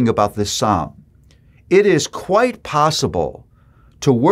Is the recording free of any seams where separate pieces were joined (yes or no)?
yes